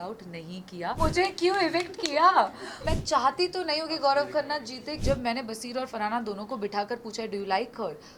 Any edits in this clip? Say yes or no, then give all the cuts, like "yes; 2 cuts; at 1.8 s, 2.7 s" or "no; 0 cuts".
yes; 3 cuts; at 1.0 s, 2.8 s, 4.9 s